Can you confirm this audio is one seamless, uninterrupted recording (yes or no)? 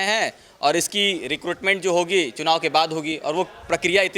yes